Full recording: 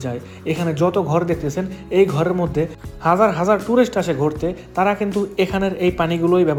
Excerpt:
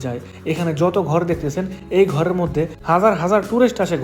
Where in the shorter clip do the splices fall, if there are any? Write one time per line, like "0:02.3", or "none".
0:02.8